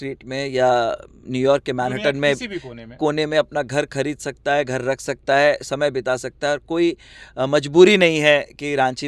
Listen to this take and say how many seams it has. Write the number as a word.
zero